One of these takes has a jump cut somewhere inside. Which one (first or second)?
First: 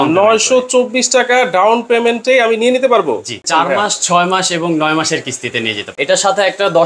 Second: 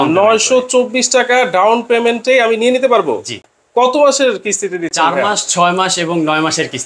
first